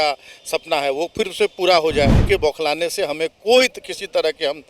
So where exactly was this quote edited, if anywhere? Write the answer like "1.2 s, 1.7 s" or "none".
2.2 s